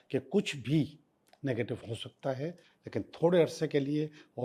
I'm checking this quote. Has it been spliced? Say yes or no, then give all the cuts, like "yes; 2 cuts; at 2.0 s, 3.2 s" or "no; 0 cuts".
no; 0 cuts